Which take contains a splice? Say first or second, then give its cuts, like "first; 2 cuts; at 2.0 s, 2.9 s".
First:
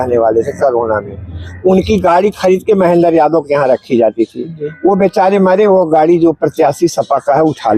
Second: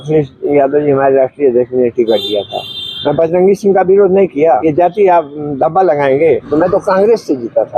second; 2 cuts; at 4.6 s, 6.5 s